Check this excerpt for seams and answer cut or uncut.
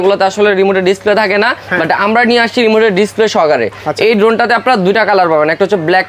uncut